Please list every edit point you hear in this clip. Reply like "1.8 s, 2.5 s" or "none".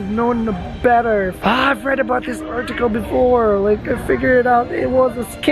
none